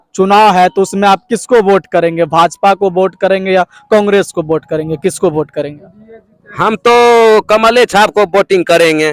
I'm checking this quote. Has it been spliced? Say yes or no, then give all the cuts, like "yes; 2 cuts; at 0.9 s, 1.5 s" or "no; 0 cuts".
no; 0 cuts